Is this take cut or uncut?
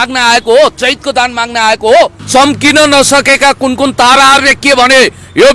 cut